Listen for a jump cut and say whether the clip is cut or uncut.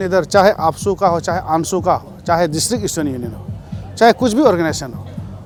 uncut